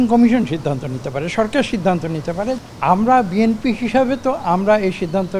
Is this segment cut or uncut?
cut